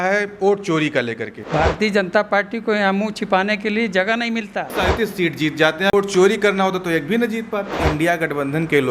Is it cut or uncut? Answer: cut